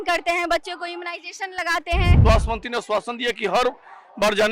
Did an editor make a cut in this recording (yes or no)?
yes